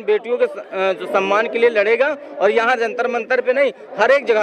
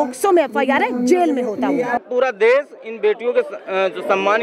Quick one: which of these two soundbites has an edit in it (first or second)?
second